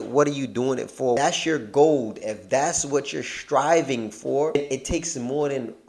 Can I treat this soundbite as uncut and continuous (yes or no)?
no